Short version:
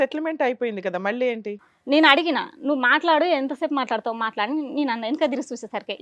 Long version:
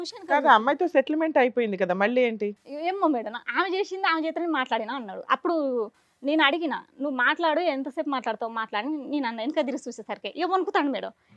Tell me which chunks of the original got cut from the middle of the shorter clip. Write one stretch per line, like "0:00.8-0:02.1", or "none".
0:02.6-0:06.0